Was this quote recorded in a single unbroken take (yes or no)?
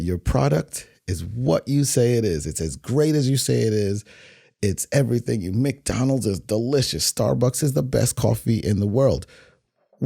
yes